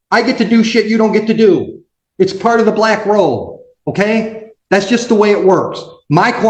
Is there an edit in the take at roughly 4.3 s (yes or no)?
no